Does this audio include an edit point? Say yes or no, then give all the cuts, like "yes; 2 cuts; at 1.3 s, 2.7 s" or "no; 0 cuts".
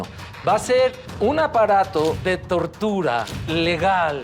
yes; 3 cuts; at 1.0 s, 2.2 s, 3.4 s